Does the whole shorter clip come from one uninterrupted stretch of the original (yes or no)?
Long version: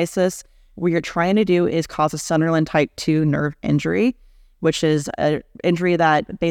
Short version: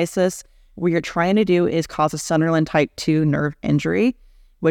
yes